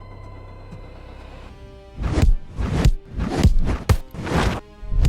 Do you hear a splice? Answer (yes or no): yes